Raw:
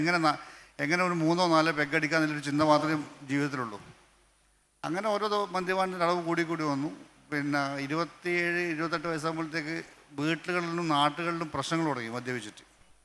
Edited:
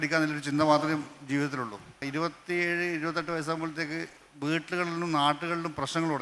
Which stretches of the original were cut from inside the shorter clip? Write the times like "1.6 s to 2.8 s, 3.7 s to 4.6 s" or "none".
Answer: 4.0 s to 7.8 s